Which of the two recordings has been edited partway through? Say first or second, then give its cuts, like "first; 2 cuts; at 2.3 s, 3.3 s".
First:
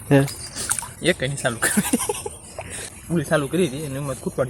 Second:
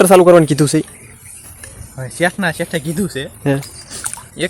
first; 1 cut; at 2.8 s